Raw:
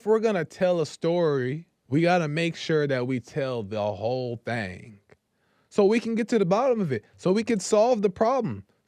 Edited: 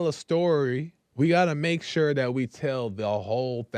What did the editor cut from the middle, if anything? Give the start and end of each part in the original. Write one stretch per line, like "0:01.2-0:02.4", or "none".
none